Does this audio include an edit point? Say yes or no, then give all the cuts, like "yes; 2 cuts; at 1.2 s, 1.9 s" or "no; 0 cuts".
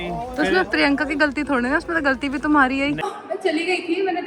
yes; 1 cut; at 3.0 s